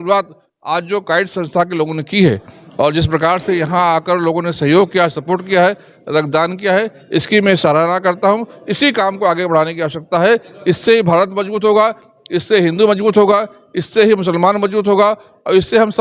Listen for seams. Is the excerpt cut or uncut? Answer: uncut